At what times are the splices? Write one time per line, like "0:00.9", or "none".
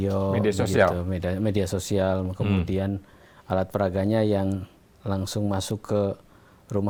none